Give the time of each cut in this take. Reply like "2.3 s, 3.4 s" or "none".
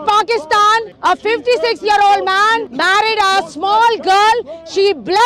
0.9 s, 2.7 s